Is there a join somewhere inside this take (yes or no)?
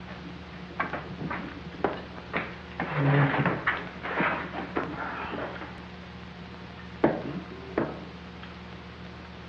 yes